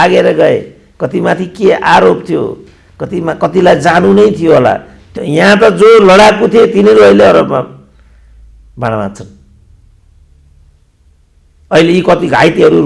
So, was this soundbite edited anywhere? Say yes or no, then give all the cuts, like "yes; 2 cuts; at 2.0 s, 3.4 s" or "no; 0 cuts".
yes; 1 cut; at 5.1 s